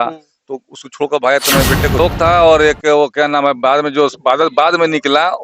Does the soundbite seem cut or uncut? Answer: cut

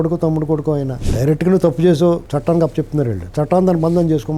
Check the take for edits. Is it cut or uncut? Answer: cut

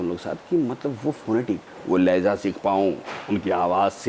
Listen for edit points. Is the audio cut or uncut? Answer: uncut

